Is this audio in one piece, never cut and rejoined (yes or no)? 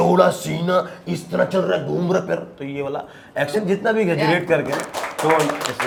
yes